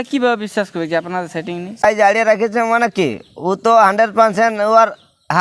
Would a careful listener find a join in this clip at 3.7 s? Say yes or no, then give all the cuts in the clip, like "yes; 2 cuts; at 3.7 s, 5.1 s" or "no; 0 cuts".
no; 1 cut; at 1.8 s